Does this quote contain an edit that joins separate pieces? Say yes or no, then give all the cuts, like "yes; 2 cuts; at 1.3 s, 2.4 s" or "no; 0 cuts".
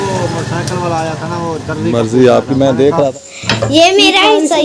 yes; 1 cut; at 3.1 s